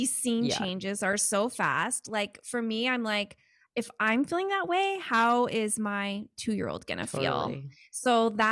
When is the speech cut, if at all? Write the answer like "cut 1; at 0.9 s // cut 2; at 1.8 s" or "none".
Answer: none